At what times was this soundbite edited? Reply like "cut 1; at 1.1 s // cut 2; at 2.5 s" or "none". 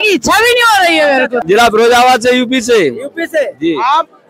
cut 1; at 1.4 s